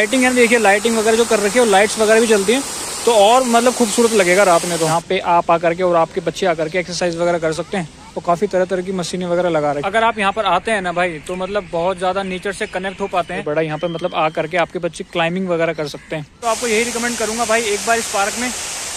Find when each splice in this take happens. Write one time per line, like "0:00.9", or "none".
0:04.9
0:09.8
0:13.4
0:16.4